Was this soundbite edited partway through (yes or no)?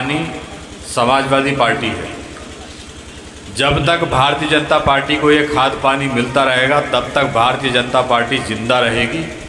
no